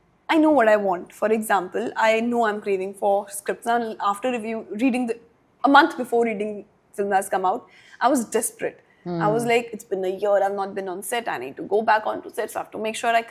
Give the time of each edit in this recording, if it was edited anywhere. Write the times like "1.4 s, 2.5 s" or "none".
none